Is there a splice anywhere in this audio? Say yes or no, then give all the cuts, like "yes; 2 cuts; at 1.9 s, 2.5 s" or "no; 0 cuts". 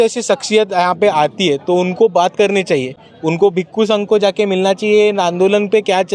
no; 0 cuts